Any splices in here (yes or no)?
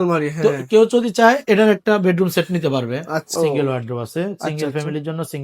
yes